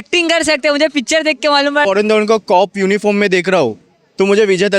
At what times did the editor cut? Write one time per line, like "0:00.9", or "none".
0:01.8